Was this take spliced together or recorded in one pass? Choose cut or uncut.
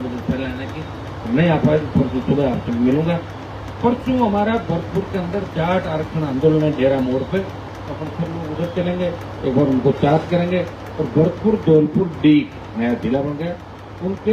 uncut